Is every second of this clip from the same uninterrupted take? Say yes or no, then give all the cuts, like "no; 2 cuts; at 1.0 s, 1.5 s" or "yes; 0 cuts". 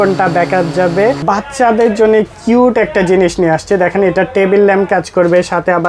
no; 1 cut; at 1.2 s